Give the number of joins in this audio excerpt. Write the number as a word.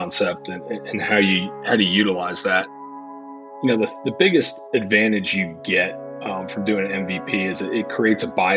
one